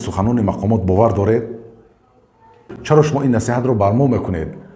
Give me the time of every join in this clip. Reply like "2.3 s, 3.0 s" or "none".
2.7 s